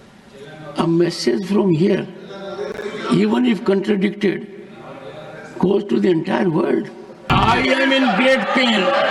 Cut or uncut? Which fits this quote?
cut